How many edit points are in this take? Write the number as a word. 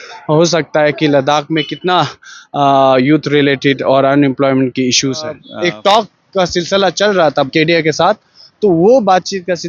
two